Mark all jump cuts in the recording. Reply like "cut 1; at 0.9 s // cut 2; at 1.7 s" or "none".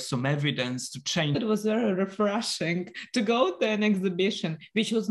cut 1; at 1.4 s